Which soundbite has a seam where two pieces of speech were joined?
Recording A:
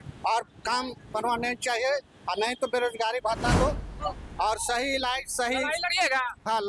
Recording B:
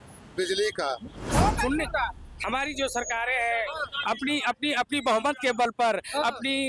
B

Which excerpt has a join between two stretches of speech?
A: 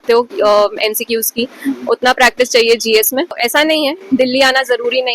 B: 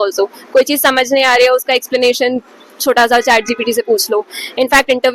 A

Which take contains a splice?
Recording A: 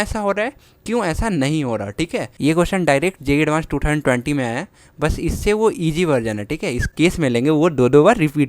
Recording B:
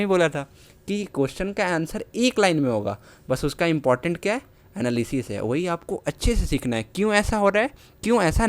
A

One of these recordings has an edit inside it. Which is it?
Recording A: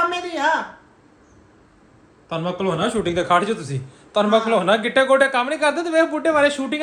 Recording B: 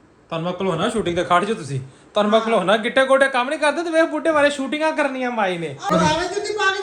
B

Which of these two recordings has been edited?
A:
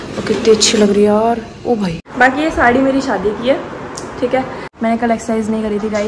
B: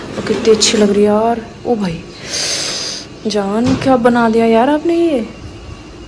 A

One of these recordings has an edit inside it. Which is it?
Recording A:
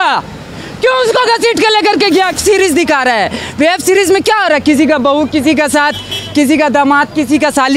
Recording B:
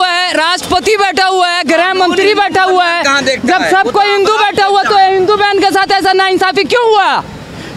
A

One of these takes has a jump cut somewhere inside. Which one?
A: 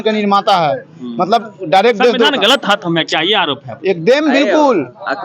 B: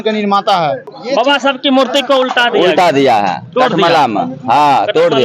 B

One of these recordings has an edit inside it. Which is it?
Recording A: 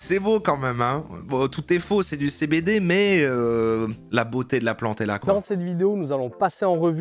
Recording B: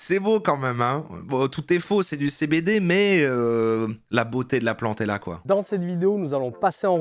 A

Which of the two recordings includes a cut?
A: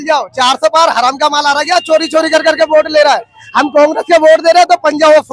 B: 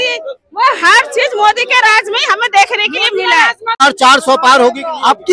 B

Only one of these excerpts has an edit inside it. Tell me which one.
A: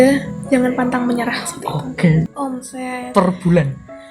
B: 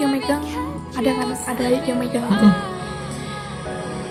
A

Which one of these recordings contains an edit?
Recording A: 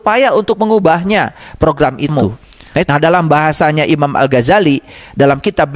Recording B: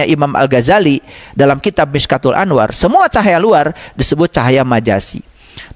A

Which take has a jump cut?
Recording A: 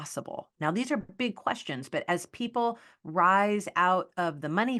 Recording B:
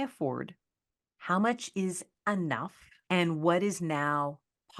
B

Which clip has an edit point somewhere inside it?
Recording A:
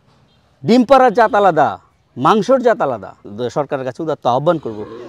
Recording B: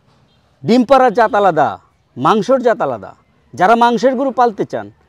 A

